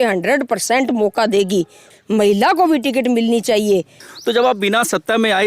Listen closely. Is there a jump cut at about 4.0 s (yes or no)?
yes